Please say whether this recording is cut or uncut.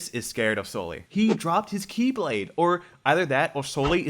cut